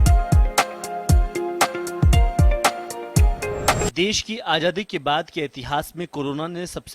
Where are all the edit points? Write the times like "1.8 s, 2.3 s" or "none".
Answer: 3.9 s